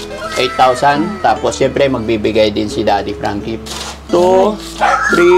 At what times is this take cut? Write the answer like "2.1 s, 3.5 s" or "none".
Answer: 1.1 s, 3.5 s